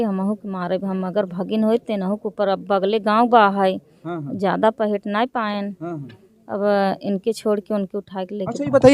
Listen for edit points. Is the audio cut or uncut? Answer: uncut